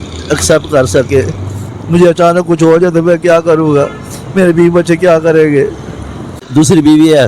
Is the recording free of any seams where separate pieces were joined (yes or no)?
no